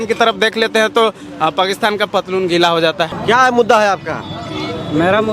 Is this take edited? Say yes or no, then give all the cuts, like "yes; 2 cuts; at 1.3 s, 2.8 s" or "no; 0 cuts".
yes; 1 cut; at 3.2 s